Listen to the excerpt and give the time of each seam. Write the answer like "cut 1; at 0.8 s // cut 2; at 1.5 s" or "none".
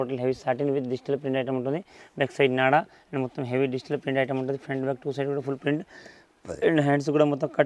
none